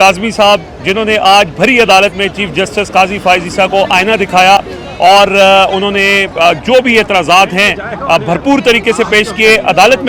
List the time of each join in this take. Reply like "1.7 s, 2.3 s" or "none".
none